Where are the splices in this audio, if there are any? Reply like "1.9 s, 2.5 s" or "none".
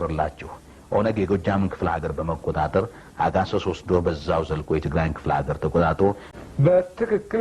6.3 s